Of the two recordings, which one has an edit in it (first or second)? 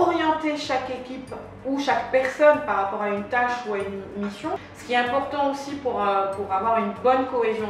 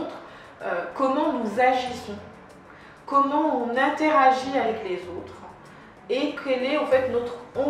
first